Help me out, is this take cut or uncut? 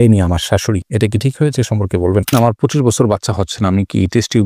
cut